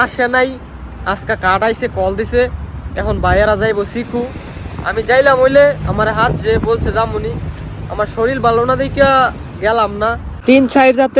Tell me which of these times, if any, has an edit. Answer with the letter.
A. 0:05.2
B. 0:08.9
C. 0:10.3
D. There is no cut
C